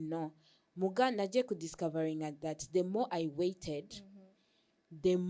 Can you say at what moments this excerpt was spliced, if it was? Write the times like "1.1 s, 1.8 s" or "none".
none